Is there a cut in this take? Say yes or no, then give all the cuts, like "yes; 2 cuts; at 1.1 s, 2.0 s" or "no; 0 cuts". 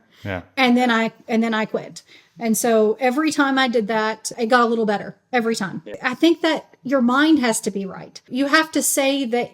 yes; 3 cuts; at 4.3 s, 6.0 s, 8.3 s